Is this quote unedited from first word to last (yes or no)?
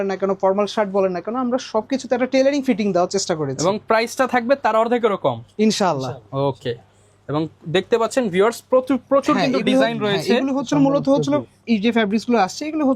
yes